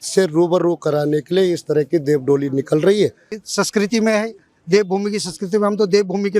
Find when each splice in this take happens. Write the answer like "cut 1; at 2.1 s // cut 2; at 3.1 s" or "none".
cut 1; at 3.4 s

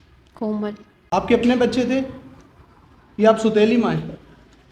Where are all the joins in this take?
cut 1; at 0.9 s

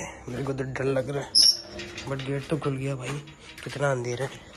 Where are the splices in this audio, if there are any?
none

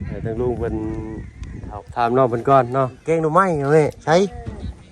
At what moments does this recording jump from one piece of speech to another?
cut 1; at 3.0 s

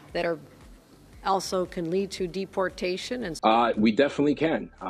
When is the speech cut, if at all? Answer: cut 1; at 3.4 s

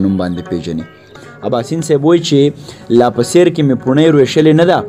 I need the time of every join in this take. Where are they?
cut 1; at 1.1 s

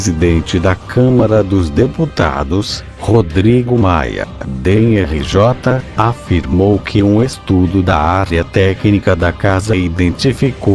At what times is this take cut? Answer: none

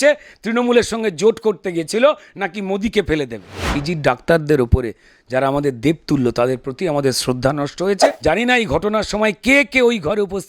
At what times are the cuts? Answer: cut 1; at 3.8 s // cut 2; at 8.0 s

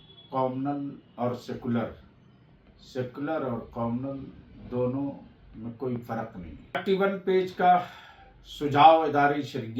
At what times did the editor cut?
cut 1; at 6.8 s

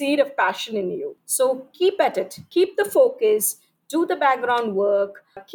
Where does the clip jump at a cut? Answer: cut 1; at 1.2 s // cut 2; at 2.4 s

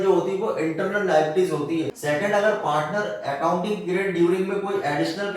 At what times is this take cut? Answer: cut 1; at 2.0 s

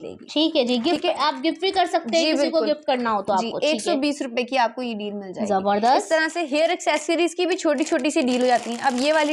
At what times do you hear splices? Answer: none

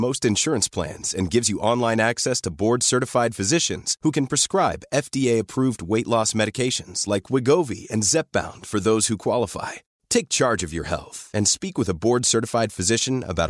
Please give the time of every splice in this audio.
none

